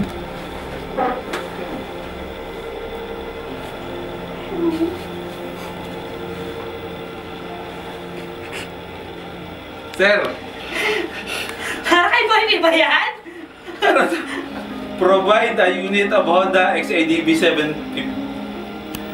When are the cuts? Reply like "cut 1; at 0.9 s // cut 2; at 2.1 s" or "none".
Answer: none